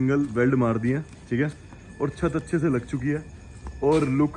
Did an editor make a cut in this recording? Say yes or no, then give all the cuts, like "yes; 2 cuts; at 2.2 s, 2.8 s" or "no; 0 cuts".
no; 0 cuts